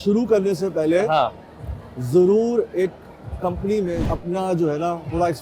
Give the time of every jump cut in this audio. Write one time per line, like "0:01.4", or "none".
0:04.1